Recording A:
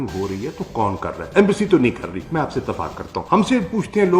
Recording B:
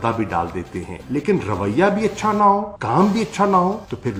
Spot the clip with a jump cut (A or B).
A